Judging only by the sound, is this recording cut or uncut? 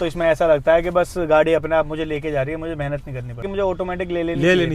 cut